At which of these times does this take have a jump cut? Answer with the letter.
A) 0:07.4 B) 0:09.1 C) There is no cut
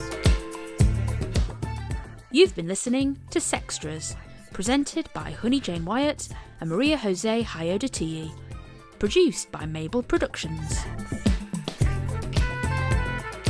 C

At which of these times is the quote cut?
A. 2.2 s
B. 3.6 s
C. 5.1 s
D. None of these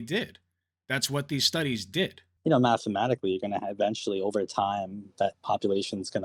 A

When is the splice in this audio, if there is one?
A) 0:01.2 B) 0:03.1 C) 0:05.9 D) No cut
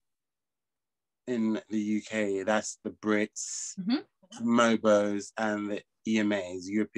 D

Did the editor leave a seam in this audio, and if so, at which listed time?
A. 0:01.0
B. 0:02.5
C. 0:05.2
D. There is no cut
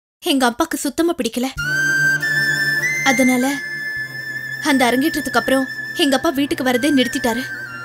D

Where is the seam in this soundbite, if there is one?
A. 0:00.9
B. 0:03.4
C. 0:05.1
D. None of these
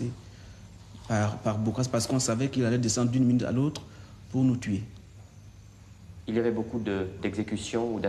D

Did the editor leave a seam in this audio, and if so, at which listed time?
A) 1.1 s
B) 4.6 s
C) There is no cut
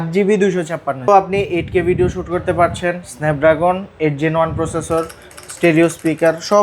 A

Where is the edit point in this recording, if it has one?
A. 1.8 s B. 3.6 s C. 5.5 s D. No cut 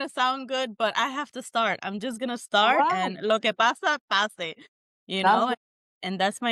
D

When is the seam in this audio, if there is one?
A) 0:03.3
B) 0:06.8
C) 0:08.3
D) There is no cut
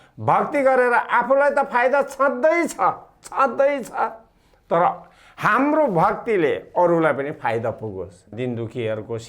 C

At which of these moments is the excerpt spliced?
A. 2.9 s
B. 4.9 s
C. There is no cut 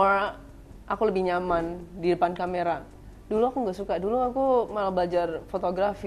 C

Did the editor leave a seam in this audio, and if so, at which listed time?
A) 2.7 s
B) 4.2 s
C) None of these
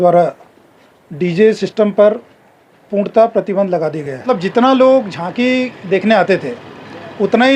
B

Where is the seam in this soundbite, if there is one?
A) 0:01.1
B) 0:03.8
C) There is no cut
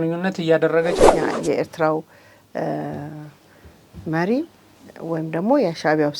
A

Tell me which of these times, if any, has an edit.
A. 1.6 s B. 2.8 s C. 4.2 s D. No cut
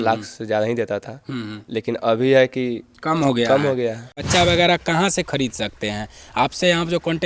C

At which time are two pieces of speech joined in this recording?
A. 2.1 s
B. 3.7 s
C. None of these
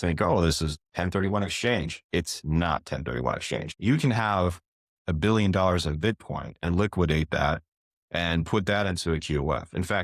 B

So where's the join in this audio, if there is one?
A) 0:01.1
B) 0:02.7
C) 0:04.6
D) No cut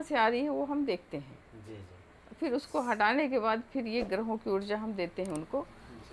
D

